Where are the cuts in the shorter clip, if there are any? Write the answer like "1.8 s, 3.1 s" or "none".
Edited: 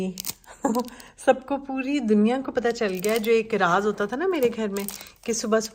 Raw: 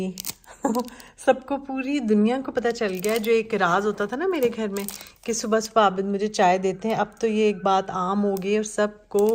none